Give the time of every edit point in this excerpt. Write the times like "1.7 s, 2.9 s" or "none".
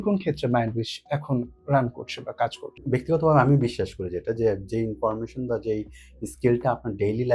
2.7 s

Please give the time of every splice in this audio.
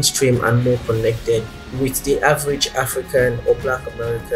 1.6 s

